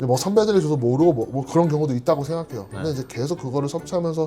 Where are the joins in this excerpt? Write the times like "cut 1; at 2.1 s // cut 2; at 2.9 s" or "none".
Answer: none